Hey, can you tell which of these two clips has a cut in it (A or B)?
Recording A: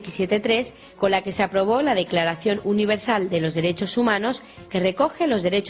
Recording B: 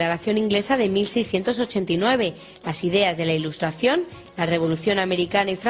A